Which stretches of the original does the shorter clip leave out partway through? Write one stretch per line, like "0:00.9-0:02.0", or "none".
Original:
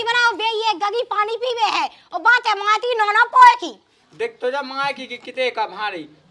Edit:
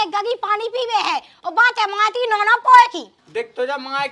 0:03.8-0:04.0